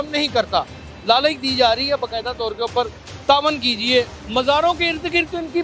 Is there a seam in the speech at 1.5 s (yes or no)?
no